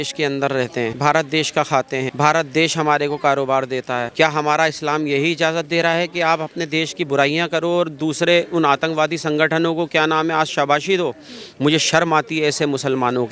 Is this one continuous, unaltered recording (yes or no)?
no